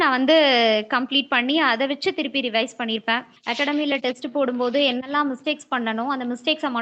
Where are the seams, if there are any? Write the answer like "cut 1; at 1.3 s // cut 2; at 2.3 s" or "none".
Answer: cut 1; at 3.3 s